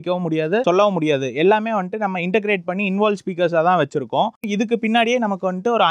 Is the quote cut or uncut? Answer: cut